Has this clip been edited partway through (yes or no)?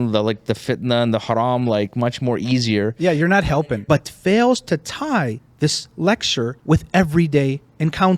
yes